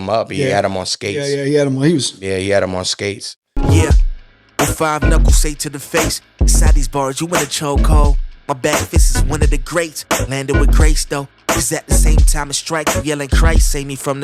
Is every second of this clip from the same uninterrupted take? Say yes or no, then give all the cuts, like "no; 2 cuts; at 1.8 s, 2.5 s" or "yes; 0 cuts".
no; 1 cut; at 3.5 s